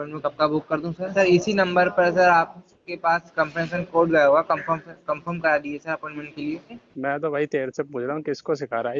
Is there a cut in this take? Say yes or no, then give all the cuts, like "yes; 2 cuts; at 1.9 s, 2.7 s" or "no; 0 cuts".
yes; 2 cuts; at 1.1 s, 6.8 s